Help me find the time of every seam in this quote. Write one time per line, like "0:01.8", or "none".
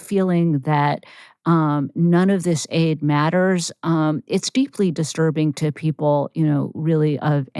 none